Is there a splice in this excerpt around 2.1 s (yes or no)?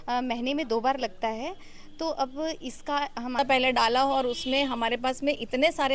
no